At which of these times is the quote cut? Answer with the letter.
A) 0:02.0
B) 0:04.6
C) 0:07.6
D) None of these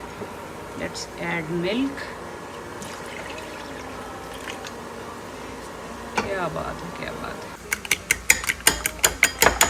C